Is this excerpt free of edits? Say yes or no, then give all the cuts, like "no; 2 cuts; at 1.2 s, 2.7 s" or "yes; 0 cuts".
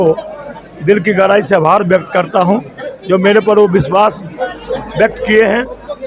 yes; 0 cuts